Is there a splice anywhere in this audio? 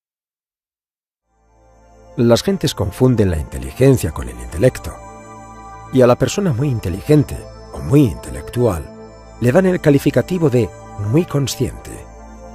yes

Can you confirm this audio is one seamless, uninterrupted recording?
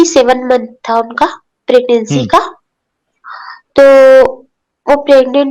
yes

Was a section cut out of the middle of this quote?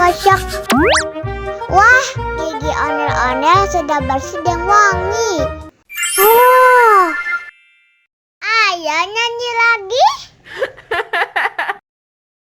no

